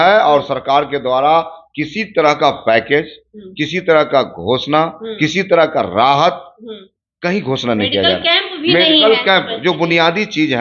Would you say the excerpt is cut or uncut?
uncut